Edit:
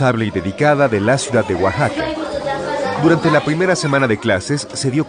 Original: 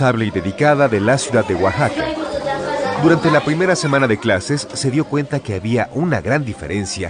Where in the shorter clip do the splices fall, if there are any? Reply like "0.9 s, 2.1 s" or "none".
none